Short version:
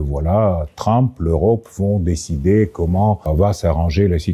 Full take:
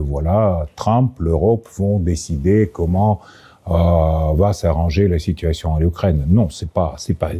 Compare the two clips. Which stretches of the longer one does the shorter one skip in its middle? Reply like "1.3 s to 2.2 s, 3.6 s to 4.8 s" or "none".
3.2 s to 4.3 s

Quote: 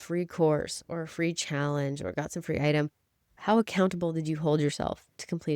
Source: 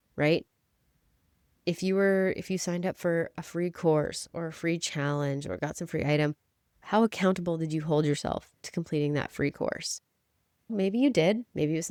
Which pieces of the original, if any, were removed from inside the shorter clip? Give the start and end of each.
none

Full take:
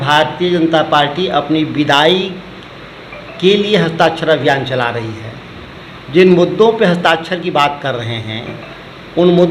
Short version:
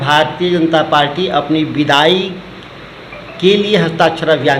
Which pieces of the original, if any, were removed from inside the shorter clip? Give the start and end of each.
none

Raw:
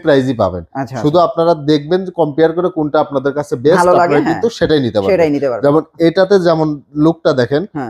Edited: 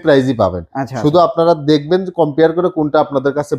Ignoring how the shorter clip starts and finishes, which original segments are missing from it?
none

